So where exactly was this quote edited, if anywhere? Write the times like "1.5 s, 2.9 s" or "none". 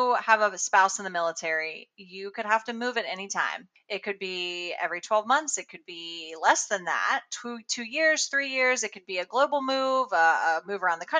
none